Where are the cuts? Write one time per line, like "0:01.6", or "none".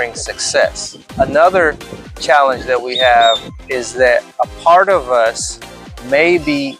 0:01.1
0:03.5